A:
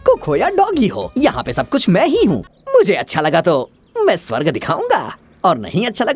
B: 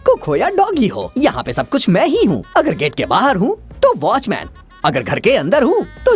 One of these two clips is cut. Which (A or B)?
A